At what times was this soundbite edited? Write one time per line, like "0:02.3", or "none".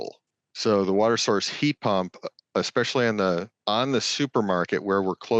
0:03.5